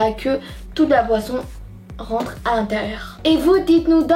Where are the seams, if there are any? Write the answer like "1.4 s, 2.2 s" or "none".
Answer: 3.1 s